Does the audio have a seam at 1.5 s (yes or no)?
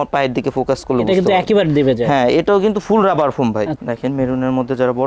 no